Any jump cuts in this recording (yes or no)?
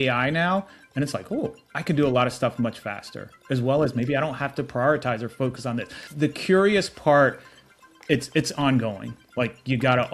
yes